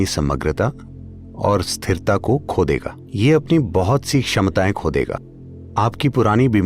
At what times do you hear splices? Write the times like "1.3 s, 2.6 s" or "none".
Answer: 5.3 s

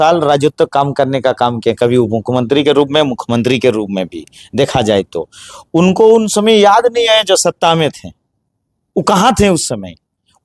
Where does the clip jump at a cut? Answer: none

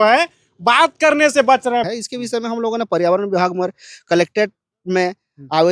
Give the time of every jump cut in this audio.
1.8 s

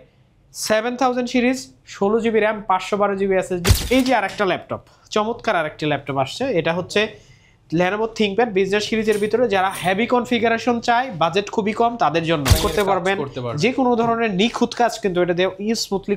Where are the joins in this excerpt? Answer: 3.6 s, 12.6 s

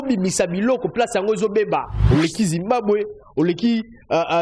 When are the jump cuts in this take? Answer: 1.9 s

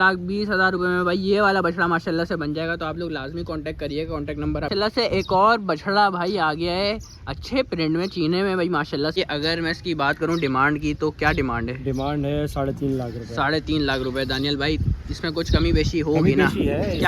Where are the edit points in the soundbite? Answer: 4.7 s, 9.2 s

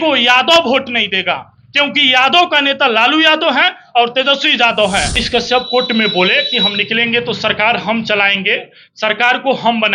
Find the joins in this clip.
5.2 s

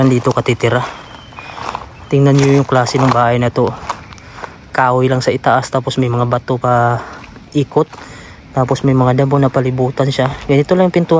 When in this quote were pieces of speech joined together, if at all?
none

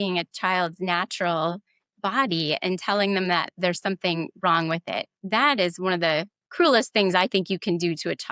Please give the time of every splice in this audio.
5.2 s

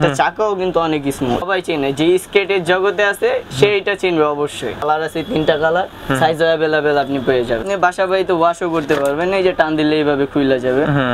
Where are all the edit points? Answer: 1.5 s, 4.8 s, 7.6 s

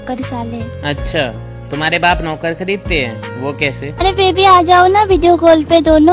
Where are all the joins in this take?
3.9 s

